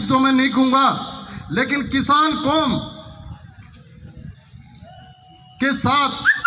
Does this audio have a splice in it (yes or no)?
no